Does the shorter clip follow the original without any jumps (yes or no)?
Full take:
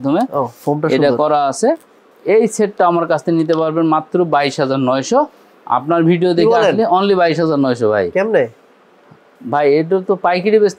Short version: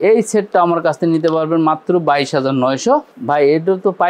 no